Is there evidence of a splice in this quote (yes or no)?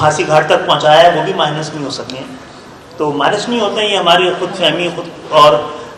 no